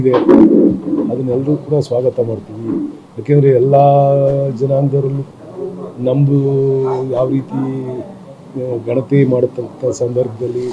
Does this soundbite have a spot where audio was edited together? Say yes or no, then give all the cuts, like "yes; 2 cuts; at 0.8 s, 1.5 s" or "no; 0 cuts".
yes; 1 cut; at 5.2 s